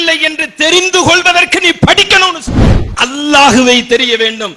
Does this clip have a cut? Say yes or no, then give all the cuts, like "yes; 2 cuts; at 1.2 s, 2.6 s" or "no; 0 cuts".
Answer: yes; 1 cut; at 2.8 s